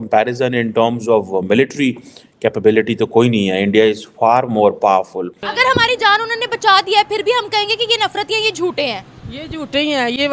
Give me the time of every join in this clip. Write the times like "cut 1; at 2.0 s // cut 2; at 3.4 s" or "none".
cut 1; at 5.4 s